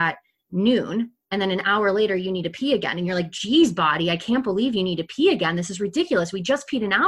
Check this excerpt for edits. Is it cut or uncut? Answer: uncut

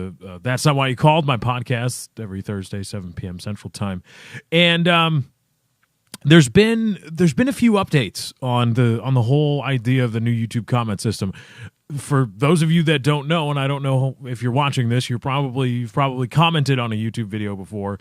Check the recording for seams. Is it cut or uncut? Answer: cut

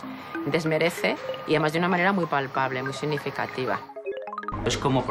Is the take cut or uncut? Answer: cut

